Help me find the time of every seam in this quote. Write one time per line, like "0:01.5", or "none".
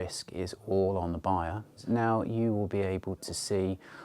0:01.7